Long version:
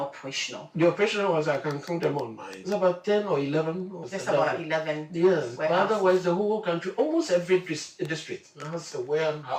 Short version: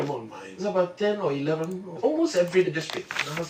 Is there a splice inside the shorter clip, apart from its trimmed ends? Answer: yes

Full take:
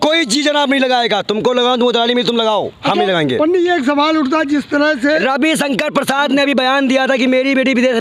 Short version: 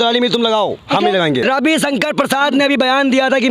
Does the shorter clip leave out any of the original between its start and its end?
yes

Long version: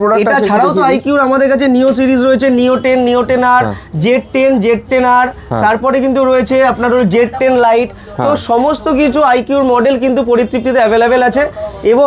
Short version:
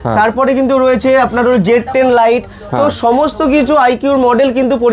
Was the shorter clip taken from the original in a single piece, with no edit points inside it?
yes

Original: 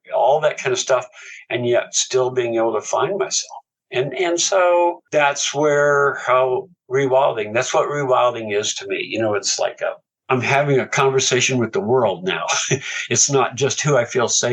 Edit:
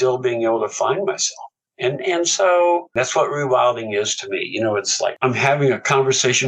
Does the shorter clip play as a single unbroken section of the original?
no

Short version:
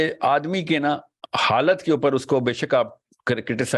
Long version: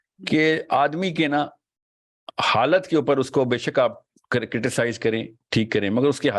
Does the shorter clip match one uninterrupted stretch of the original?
no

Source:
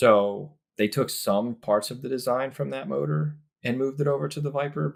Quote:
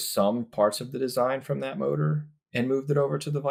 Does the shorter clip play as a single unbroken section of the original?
yes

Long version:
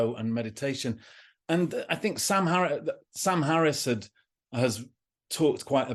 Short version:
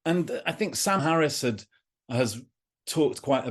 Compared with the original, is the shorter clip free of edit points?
no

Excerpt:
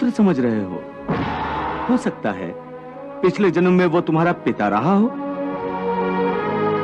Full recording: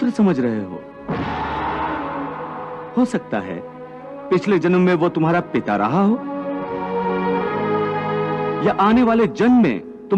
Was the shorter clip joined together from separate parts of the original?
yes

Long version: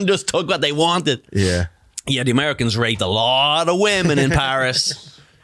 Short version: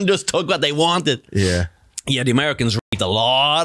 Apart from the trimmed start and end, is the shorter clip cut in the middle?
no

